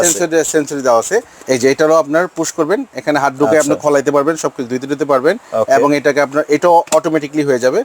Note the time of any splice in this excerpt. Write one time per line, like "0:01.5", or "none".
0:01.3